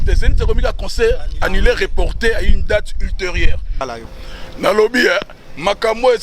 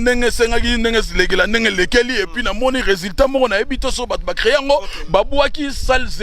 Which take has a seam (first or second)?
first